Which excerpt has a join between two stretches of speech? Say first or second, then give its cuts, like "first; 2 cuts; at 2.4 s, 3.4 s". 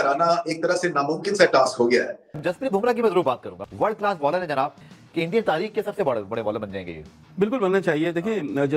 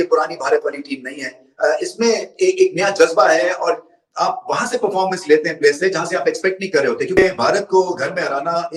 first; 2 cuts; at 2.3 s, 5.0 s